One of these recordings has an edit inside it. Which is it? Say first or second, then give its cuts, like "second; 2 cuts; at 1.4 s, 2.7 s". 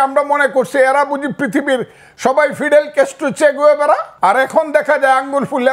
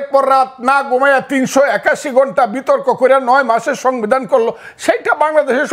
first; 1 cut; at 4.1 s